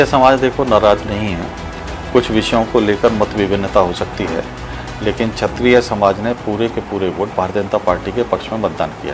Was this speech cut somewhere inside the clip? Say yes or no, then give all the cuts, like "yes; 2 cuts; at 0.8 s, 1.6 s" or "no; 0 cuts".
no; 0 cuts